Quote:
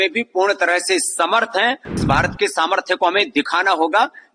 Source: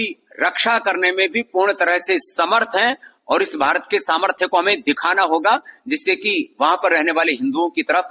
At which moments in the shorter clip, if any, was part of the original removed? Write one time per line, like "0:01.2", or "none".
0:02.0